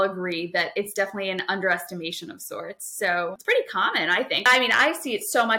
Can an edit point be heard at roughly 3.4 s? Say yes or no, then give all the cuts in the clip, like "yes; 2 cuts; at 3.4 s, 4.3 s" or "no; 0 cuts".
yes; 2 cuts; at 3.4 s, 4.4 s